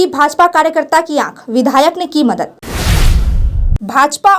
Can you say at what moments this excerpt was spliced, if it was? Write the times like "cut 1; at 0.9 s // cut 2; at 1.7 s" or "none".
cut 1; at 2.5 s